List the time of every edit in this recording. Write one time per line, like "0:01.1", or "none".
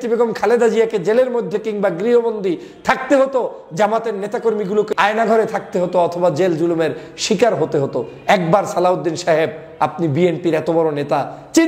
0:04.9